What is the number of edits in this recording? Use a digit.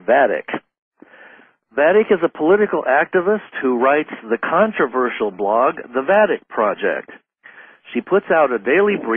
0